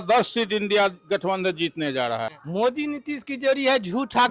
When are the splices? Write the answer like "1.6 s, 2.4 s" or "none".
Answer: 2.3 s